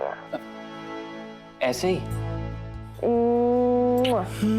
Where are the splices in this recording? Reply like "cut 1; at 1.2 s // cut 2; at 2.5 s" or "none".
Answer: cut 1; at 2.2 s